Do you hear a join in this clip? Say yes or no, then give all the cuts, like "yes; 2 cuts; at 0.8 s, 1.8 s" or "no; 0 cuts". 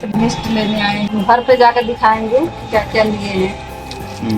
yes; 1 cut; at 1.1 s